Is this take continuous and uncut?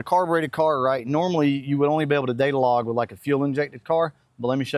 yes; 0 cuts

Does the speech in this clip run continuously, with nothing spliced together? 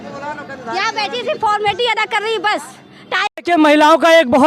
no; 1 cut; at 3.3 s

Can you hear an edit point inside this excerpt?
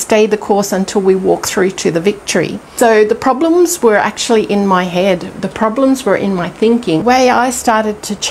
yes; 2 cuts; at 2.6 s, 7.0 s

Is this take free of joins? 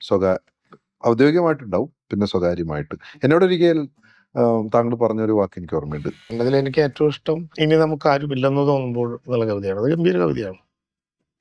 no; 1 cut; at 6.3 s

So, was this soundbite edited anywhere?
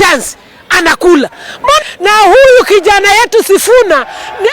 yes; 1 cut; at 1.8 s

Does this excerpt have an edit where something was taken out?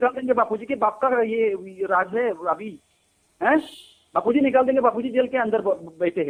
no; 0 cuts

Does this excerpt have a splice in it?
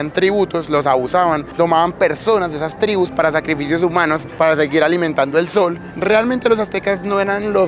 no; 0 cuts

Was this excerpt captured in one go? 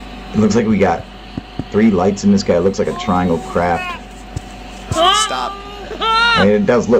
yes; 0 cuts

